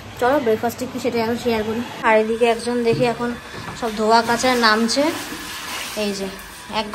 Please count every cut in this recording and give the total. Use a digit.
1